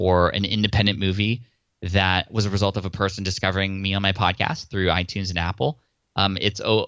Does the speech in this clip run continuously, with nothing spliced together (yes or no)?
yes